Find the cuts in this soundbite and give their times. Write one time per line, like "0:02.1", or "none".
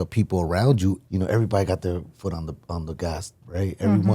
0:01.0